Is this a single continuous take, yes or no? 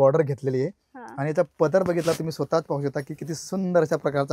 yes